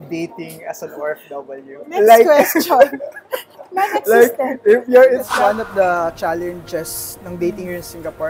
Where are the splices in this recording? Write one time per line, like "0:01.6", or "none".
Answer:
0:05.3